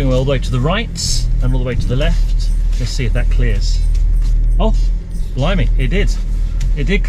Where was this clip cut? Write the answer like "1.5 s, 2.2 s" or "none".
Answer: none